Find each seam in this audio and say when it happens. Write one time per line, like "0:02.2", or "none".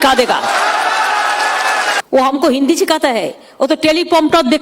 0:02.0